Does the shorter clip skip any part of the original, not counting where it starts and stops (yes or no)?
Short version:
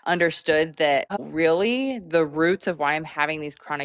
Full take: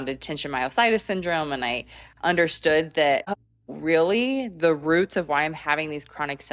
yes